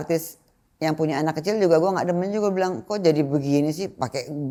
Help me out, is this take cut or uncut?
uncut